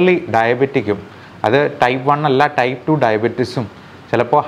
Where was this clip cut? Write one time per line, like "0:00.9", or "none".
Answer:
none